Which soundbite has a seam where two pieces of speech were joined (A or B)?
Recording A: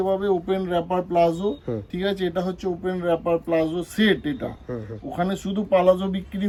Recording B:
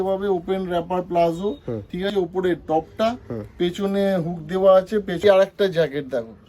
B